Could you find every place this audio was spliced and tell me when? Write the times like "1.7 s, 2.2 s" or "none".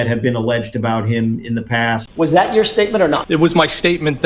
2.1 s, 3.2 s

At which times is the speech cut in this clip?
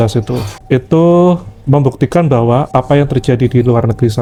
none

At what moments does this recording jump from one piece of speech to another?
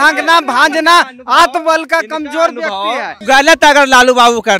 3.2 s

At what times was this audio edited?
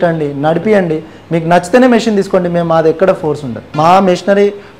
3.6 s

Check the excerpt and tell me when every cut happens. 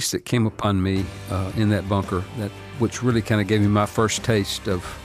2.6 s

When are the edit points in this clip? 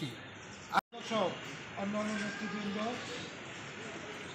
0.9 s

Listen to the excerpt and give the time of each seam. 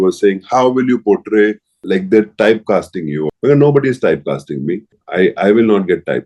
1.7 s, 3.2 s, 4.9 s

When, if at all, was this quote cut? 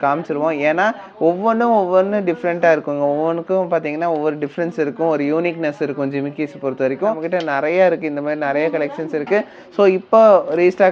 7.2 s

